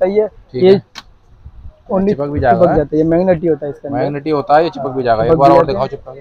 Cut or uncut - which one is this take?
uncut